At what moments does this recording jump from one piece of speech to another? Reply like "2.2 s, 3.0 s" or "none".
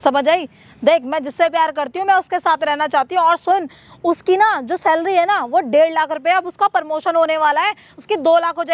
none